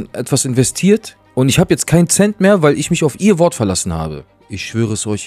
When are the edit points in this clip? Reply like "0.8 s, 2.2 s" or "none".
1.2 s, 4.2 s

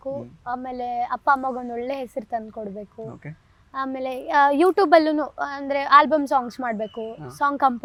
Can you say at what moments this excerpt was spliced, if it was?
none

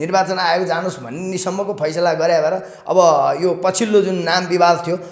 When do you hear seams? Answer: none

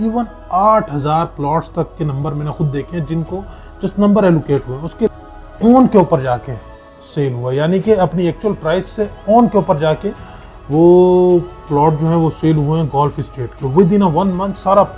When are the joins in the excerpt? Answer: 5.1 s

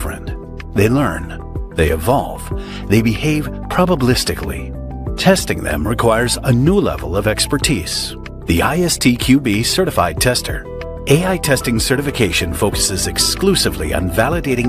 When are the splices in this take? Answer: 10.9 s

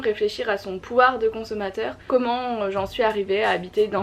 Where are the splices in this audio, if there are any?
2.0 s

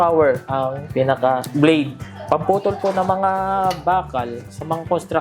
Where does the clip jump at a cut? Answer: 0.9 s, 2.1 s

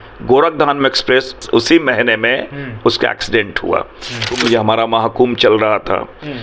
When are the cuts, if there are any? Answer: 1.4 s, 4.3 s

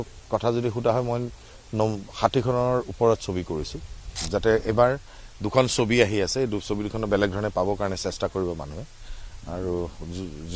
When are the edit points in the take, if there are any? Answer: 4.2 s

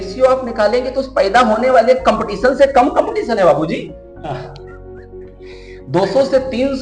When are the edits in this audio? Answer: 4.6 s, 5.9 s

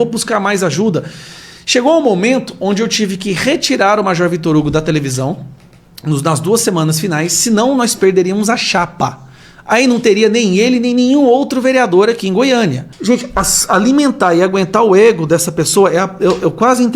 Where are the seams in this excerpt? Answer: 12.9 s

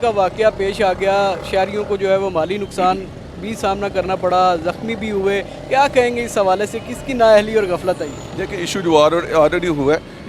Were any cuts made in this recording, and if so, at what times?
none

